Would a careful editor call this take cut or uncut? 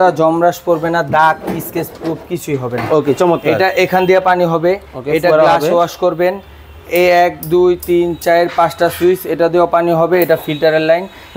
uncut